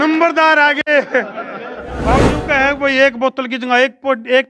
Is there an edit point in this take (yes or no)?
yes